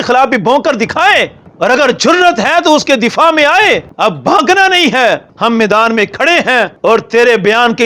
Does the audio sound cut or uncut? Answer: cut